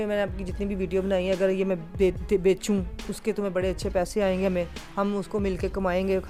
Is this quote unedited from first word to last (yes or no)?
yes